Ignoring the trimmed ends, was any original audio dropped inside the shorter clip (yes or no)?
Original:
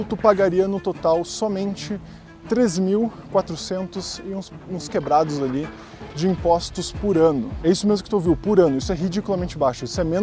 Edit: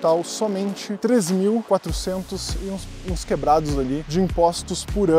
yes